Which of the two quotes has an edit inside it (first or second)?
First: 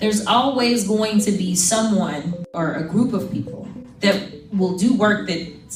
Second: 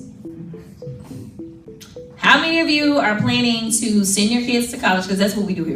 second